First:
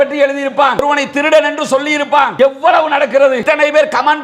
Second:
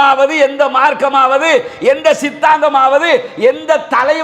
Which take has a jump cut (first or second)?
first